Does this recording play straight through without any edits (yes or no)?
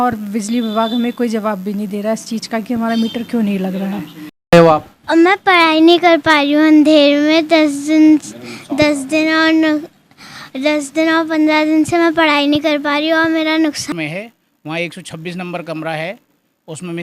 no